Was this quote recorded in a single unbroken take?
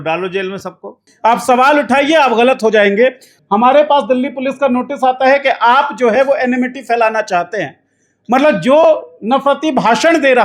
no; 2 cuts; at 1.0 s, 3.3 s

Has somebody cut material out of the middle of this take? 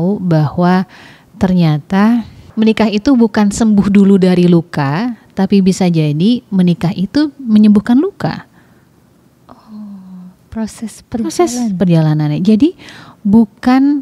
yes; 1 cut; at 2.4 s

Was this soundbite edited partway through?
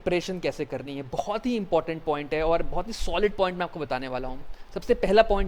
no; 0 cuts

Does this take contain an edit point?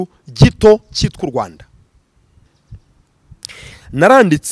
yes; 1 cut; at 2.5 s

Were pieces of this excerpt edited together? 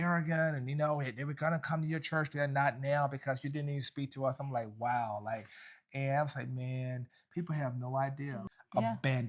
yes; 1 cut; at 8.3 s

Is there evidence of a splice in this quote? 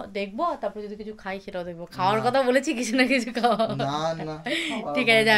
no; 0 cuts

